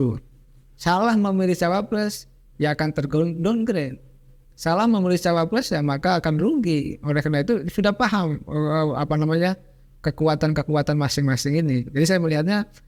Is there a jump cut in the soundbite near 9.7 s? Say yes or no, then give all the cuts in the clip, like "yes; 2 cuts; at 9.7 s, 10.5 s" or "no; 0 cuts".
no; 0 cuts